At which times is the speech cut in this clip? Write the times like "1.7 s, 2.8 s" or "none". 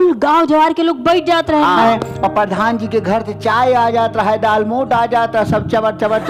1.8 s